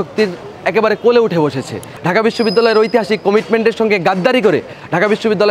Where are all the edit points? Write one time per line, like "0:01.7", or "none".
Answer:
0:01.9

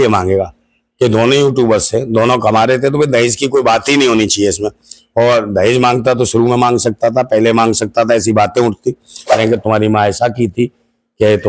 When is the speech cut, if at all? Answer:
0:09.4

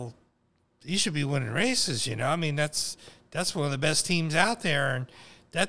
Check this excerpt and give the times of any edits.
none

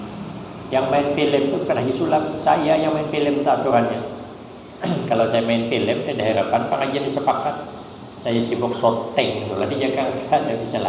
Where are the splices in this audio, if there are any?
none

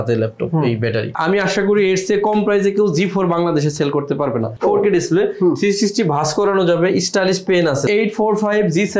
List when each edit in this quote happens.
0:01.1
0:04.5
0:07.9

